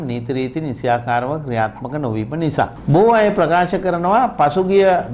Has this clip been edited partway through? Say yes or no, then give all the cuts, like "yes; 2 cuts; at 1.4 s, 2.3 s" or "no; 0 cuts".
yes; 1 cut; at 2.8 s